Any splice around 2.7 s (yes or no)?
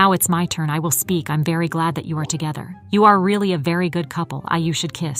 yes